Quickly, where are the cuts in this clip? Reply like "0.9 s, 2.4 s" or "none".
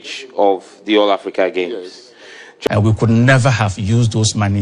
2.7 s